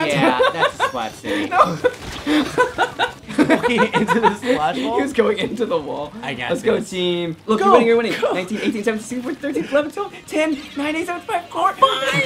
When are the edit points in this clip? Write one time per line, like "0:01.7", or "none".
0:03.2
0:07.4